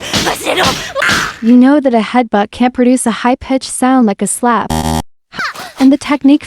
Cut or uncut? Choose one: cut